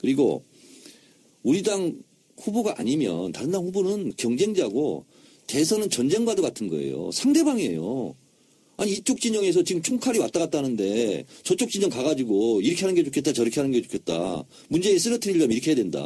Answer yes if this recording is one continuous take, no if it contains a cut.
no